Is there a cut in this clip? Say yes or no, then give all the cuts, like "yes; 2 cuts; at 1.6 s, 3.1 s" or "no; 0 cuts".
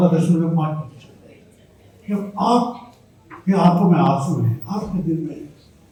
no; 0 cuts